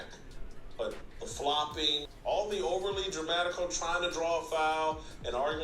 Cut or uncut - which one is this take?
cut